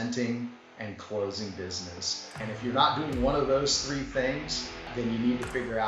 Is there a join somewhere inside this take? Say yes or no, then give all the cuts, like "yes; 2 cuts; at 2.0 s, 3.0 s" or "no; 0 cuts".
yes; 2 cuts; at 2.4 s, 4.9 s